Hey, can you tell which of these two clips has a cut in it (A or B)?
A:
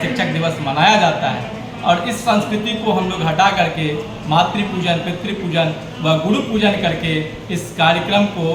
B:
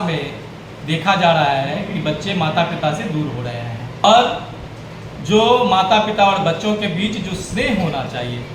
B